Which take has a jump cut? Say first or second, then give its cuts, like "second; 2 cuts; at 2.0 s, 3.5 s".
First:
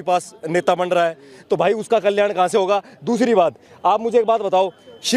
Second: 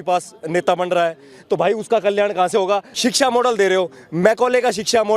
second; 1 cut; at 2.9 s